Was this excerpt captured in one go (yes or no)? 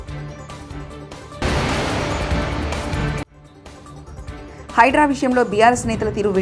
no